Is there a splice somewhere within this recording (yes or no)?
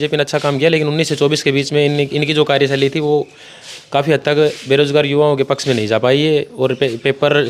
no